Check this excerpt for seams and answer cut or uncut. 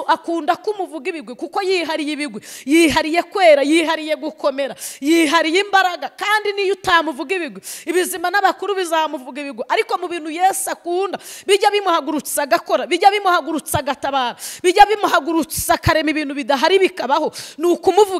uncut